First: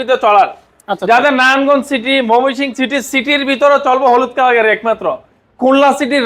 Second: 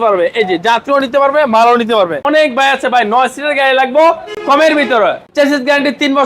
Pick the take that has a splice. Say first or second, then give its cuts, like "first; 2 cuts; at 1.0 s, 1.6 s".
second; 3 cuts; at 2.2 s, 4.3 s, 5.2 s